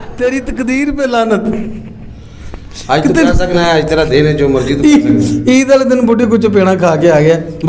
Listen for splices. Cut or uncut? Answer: uncut